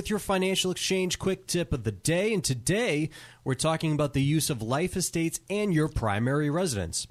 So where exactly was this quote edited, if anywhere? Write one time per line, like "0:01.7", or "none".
none